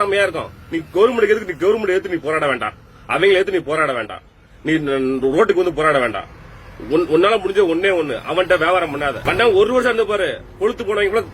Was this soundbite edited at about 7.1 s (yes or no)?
no